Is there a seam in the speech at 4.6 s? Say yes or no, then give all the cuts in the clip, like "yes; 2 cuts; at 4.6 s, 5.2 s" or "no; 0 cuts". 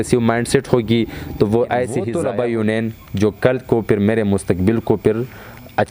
no; 1 cut; at 2.1 s